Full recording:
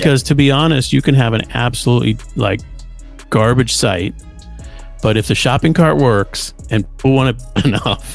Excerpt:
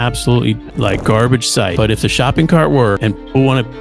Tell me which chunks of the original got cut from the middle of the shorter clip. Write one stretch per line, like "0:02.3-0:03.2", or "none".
0:02.6-0:03.3
0:04.0-0:05.0
0:06.3-0:06.7